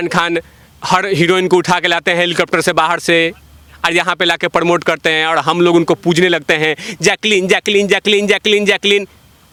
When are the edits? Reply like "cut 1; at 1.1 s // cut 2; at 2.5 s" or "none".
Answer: none